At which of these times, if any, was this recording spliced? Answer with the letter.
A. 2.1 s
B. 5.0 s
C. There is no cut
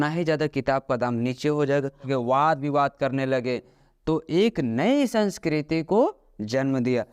A